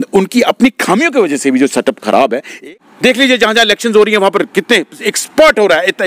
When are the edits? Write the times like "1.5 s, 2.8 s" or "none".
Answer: 2.5 s